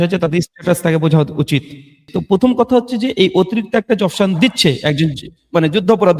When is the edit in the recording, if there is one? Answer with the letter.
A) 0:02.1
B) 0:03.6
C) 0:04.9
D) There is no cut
A